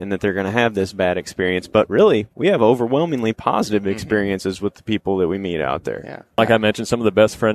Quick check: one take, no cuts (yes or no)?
no